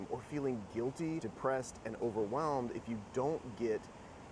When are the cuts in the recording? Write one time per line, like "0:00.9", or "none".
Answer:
0:01.3